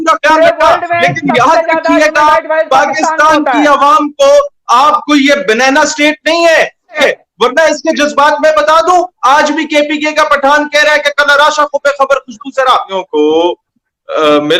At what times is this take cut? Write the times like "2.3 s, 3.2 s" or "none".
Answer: 7.0 s, 12.8 s